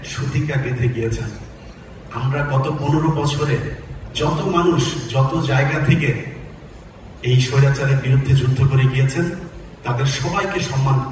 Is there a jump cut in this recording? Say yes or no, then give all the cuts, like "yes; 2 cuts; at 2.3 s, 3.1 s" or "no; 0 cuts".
no; 0 cuts